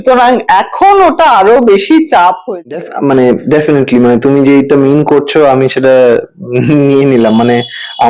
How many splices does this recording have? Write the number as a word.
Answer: one